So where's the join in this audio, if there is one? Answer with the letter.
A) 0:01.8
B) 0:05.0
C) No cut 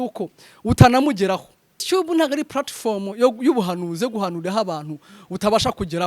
A